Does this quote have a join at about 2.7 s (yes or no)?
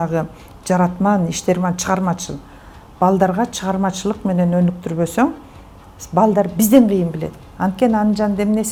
no